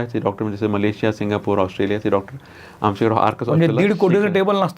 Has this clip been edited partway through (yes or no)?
no